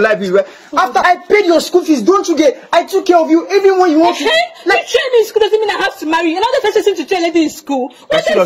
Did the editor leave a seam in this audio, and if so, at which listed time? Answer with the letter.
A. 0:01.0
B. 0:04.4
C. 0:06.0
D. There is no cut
A